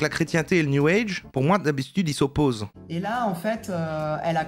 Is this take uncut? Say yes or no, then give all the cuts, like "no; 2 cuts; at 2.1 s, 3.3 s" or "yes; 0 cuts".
no; 1 cut; at 3.1 s